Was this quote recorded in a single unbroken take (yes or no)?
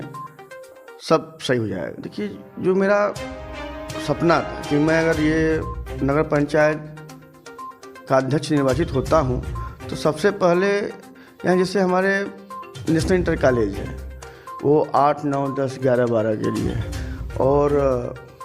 no